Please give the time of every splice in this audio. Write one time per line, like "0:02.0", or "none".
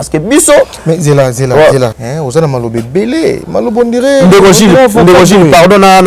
0:02.1